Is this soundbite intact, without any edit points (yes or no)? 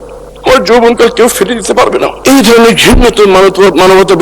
no